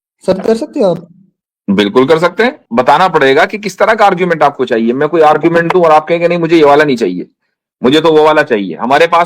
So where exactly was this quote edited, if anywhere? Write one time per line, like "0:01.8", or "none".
0:02.6